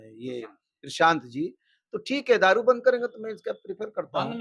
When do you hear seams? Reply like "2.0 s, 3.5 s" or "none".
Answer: none